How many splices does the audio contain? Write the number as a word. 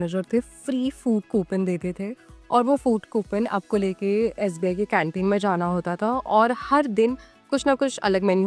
zero